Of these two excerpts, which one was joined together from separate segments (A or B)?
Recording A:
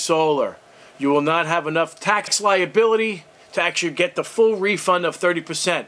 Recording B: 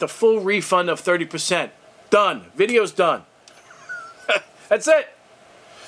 A